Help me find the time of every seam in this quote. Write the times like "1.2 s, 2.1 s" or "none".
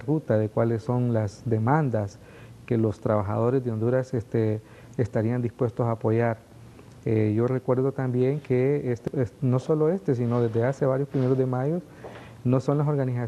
3.3 s